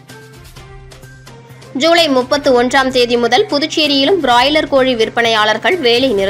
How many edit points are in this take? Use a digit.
1